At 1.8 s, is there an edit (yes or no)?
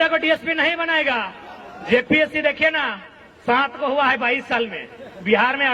no